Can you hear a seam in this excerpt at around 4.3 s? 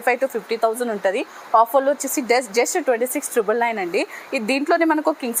no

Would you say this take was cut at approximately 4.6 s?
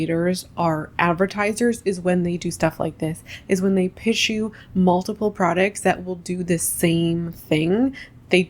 no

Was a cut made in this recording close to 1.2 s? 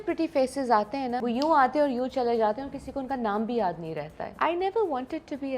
yes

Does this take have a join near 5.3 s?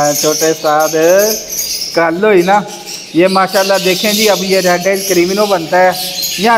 no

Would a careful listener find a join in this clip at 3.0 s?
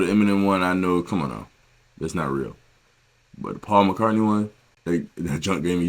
no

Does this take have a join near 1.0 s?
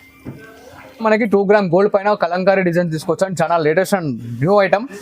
yes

